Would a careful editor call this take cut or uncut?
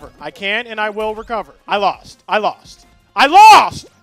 uncut